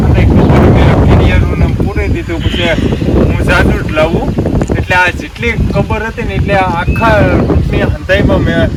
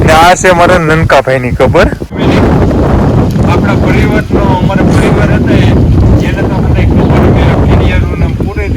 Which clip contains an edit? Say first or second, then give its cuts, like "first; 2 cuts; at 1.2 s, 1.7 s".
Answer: second; 1 cut; at 2.2 s